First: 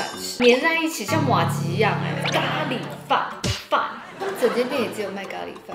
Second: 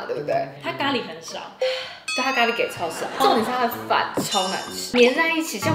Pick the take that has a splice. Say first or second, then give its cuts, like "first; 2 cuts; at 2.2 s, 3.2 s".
first; 2 cuts; at 2.2 s, 4.1 s